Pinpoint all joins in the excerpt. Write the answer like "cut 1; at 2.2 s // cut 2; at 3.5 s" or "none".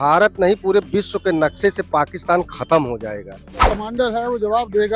cut 1; at 3.5 s